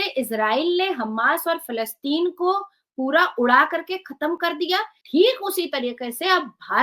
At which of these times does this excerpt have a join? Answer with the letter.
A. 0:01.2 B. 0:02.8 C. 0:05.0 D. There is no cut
C